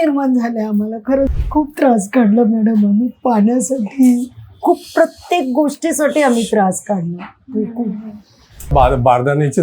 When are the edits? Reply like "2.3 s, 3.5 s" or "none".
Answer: 1.3 s, 8.7 s